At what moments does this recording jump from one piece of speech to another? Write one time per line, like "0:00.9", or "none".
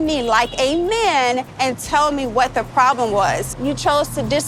0:01.5
0:03.5

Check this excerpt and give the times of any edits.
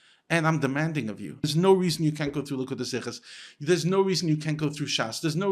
0:01.4

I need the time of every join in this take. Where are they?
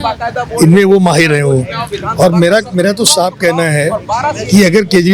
none

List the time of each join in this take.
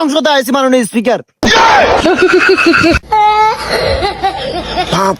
none

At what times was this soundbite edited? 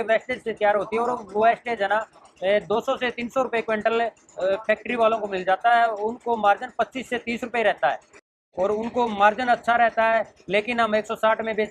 0:08.3

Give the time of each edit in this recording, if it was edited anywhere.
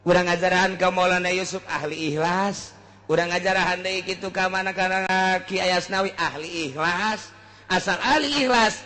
0:05.1

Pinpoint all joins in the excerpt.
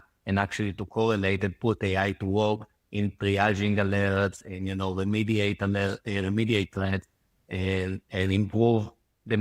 none

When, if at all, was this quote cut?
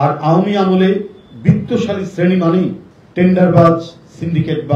none

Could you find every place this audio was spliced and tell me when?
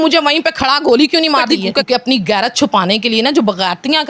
0:01.9

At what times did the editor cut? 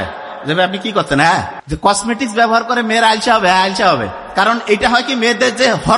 0:01.6

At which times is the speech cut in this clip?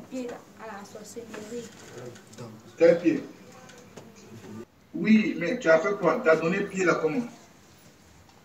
none

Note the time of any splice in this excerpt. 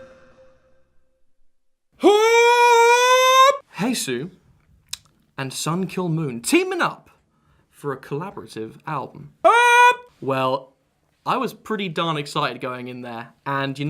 0:08.9

